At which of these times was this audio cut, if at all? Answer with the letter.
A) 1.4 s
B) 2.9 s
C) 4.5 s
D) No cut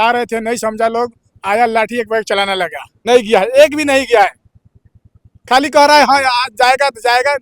B